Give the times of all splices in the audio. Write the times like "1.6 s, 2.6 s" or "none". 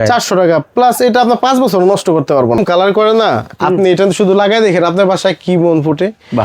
2.6 s